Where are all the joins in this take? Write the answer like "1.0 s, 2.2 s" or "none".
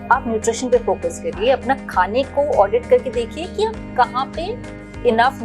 none